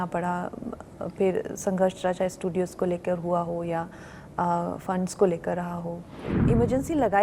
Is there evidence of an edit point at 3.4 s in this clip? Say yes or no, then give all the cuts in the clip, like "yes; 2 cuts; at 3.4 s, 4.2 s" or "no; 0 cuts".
no; 1 cut; at 6.3 s